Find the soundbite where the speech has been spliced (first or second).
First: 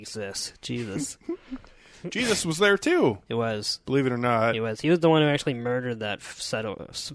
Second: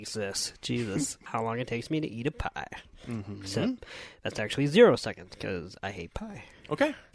second